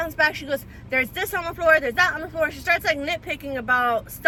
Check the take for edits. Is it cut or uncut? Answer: uncut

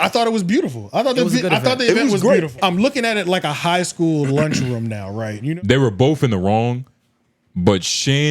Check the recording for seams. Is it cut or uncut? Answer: cut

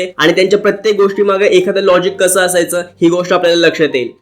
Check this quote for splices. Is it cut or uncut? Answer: uncut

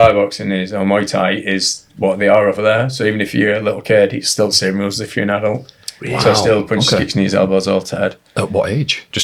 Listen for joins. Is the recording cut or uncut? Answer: uncut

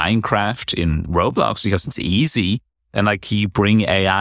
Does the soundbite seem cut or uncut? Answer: cut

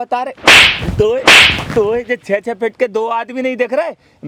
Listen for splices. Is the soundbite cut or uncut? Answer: uncut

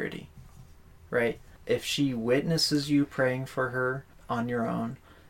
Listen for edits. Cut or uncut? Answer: cut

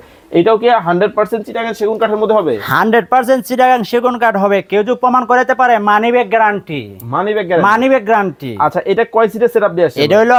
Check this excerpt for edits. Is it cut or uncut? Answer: uncut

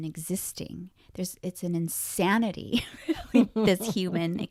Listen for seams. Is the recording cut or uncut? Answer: uncut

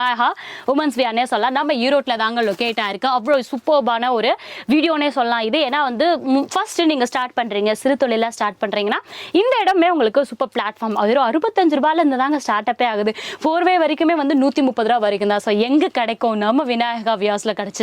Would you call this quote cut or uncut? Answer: uncut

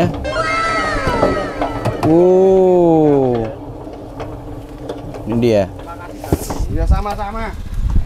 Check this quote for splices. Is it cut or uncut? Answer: uncut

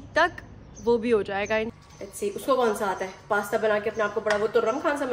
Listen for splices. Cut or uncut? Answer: cut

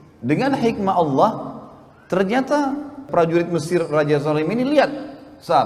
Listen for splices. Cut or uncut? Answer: cut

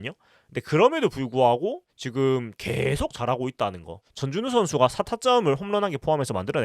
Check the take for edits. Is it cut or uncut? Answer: cut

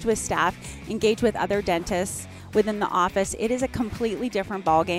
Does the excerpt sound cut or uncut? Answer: uncut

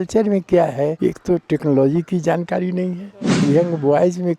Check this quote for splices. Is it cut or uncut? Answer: cut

